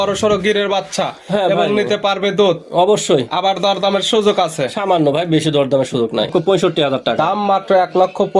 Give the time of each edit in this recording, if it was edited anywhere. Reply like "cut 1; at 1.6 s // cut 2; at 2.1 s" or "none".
cut 1; at 6.3 s